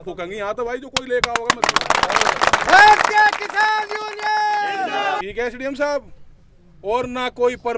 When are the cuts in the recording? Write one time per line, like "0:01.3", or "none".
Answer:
0:05.2